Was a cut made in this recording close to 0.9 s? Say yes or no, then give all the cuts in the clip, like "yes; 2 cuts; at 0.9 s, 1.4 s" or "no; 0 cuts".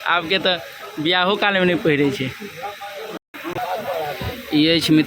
no; 1 cut; at 3.3 s